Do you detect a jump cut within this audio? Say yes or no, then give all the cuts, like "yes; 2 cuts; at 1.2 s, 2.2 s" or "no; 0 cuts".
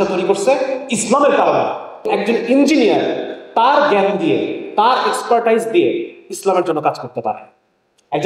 yes; 1 cut; at 2.1 s